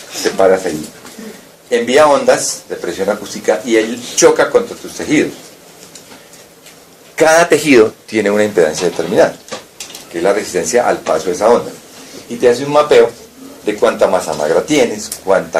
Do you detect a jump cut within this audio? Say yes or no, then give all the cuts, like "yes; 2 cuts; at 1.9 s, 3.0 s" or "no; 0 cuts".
no; 0 cuts